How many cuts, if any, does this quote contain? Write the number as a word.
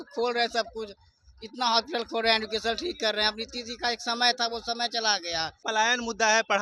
one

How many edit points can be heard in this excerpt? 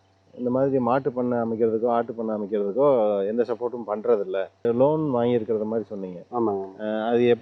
one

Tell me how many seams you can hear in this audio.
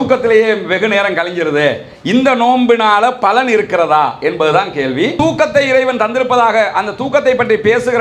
one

